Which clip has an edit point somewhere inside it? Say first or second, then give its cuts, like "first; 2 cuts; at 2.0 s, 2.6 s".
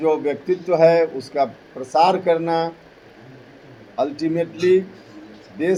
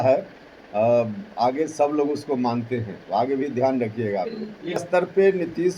second; 1 cut; at 4.8 s